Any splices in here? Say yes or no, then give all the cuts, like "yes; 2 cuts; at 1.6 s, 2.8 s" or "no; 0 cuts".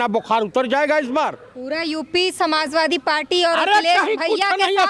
yes; 1 cut; at 1.5 s